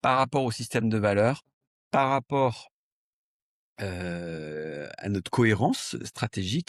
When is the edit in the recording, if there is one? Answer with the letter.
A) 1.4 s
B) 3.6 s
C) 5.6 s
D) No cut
D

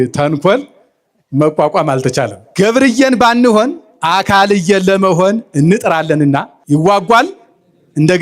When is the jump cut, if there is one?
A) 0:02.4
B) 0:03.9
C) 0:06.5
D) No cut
A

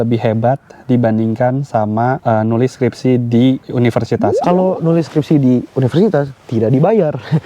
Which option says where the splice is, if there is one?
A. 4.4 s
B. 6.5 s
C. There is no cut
A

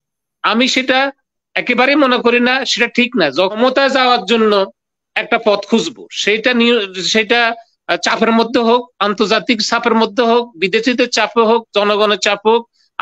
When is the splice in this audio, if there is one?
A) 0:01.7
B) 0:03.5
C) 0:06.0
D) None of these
B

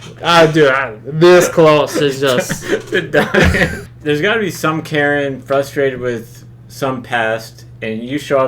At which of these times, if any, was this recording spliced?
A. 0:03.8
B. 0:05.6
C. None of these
A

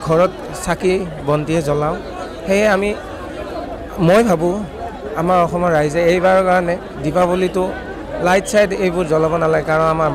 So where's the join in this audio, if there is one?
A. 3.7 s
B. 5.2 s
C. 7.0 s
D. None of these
D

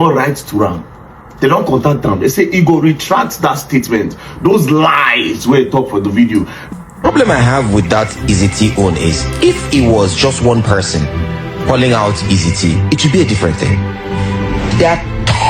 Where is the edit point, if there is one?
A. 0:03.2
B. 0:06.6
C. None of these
B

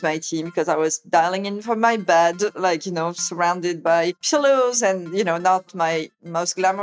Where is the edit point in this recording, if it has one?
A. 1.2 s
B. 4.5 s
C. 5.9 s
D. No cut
C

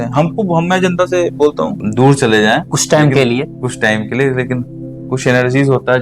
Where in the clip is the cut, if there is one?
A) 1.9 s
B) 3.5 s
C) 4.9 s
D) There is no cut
A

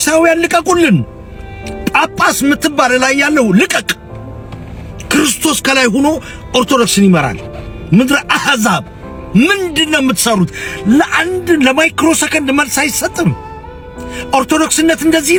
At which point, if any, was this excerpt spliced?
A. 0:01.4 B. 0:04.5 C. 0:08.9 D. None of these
D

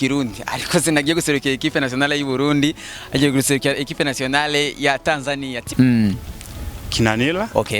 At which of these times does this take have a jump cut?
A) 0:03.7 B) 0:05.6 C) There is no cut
B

